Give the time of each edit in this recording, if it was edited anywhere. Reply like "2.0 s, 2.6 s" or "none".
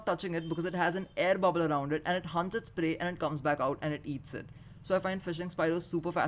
none